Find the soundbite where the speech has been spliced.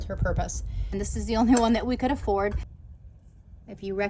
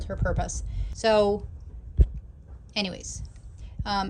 first; 2 cuts; at 0.9 s, 2.7 s

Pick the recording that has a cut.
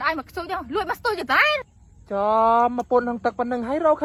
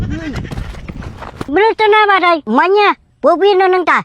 second; 2 cuts; at 1.5 s, 2.4 s

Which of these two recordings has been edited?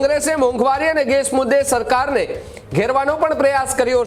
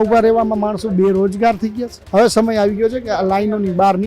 second; 1 cut; at 1.9 s

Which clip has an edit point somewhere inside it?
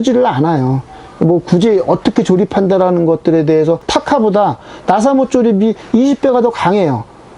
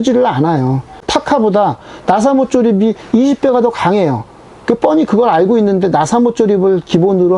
second; 1 cut; at 1.0 s

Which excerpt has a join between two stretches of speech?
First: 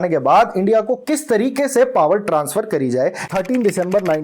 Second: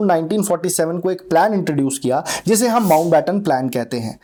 first; 1 cut; at 3.2 s

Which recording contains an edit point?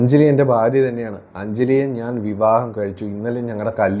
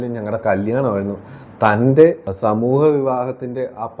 second; 1 cut; at 2.3 s

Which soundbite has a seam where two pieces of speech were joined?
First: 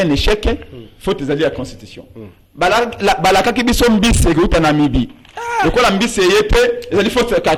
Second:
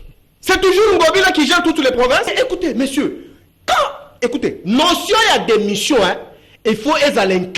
second; 1 cut; at 2.3 s

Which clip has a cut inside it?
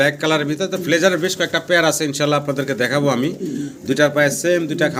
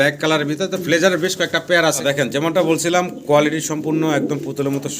second; 1 cut; at 2.0 s

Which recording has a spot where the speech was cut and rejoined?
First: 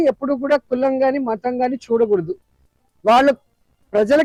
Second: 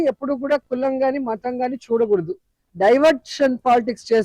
second; 1 cut; at 2.6 s

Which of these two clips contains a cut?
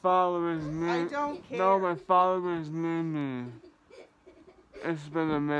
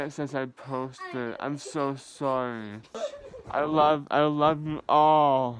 second; 1 cut; at 2.9 s

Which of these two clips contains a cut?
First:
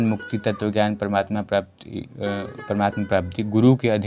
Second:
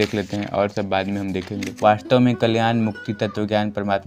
second; 1 cut; at 1.6 s

